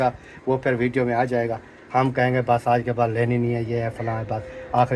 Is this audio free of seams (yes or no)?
yes